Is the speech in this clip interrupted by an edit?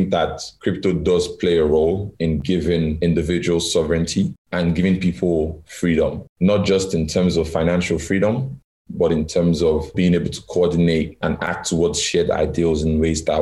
no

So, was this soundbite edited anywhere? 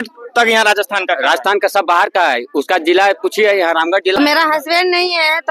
yes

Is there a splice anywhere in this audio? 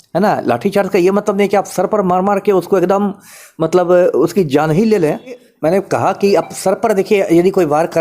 yes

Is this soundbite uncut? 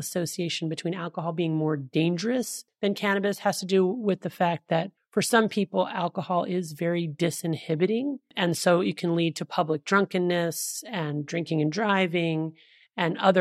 no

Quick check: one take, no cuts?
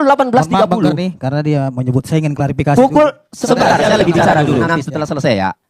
yes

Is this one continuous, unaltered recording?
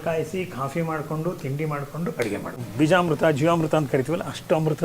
no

